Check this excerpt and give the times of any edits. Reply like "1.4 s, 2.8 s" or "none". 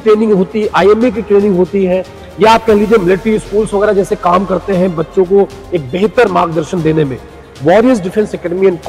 none

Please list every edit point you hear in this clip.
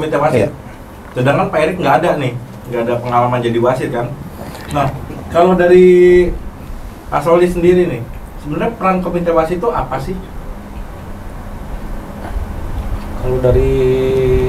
none

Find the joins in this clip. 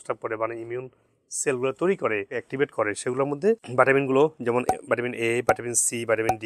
2.4 s

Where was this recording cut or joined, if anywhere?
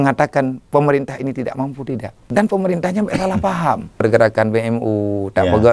2.1 s, 4.0 s

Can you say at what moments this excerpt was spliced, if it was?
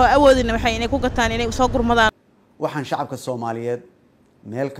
2.1 s

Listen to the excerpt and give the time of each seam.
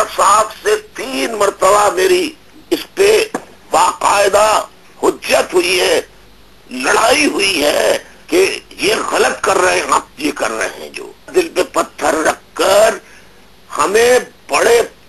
8.1 s, 11.3 s

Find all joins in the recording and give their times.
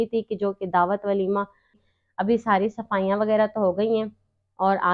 1.8 s

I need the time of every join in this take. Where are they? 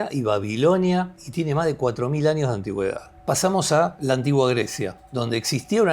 1.2 s, 3.1 s, 4.0 s, 5.0 s

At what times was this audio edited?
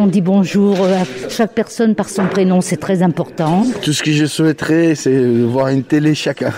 1.2 s, 3.8 s

